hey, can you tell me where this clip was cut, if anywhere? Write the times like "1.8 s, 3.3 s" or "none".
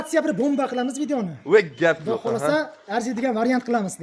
none